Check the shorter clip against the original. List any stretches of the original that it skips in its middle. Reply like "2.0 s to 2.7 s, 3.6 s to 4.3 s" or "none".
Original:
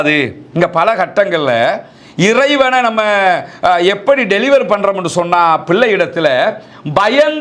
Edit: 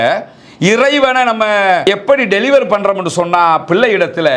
3.4 s to 3.8 s